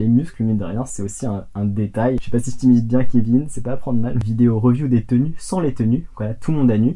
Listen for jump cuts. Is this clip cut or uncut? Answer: cut